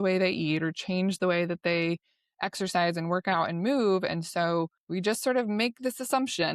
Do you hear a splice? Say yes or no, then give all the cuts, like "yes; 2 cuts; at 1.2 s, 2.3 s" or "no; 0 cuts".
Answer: yes; 1 cut; at 4.8 s